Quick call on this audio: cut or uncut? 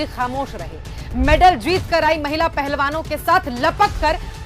uncut